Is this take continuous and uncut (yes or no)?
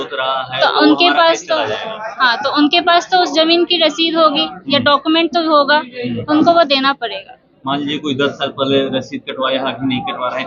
yes